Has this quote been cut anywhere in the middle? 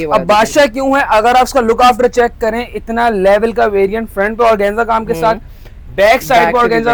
no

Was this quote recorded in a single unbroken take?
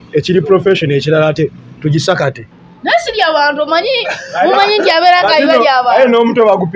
no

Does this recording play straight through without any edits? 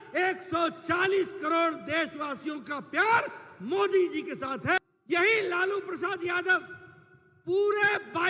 no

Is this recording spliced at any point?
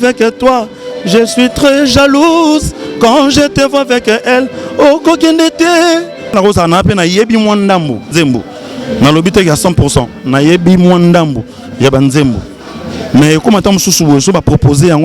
yes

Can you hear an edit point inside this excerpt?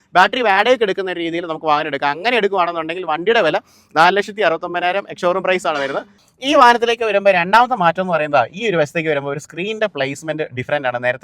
yes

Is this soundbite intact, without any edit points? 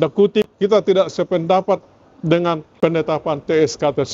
no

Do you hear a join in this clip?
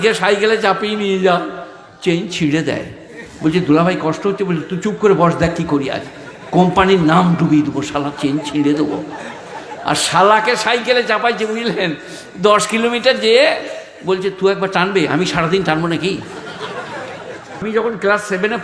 yes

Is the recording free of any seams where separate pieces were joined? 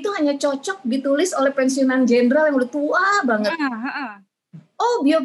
yes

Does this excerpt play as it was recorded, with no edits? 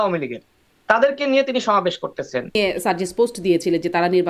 no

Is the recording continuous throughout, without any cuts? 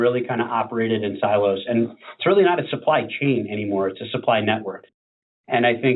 no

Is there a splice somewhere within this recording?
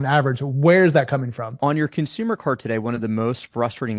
yes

